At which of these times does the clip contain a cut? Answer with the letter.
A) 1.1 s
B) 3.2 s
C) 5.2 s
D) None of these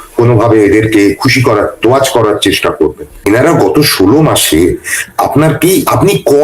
B